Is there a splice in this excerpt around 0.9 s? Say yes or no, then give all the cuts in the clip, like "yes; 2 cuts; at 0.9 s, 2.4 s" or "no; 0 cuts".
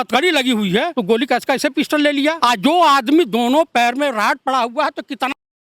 yes; 2 cuts; at 0.9 s, 2.4 s